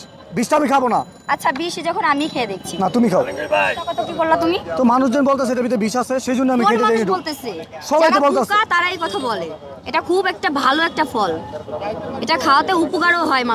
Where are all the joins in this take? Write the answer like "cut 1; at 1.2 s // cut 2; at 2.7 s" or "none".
cut 1; at 4.0 s